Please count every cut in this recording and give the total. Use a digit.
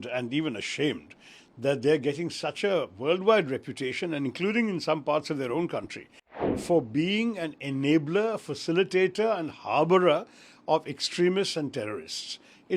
1